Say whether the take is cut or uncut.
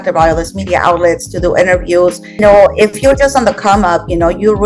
cut